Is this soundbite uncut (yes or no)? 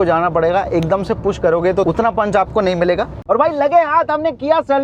no